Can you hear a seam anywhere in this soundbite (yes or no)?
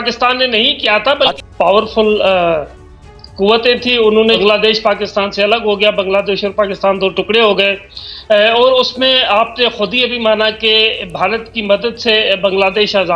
yes